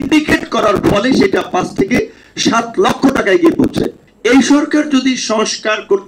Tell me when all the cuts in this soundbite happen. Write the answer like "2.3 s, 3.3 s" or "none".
4.0 s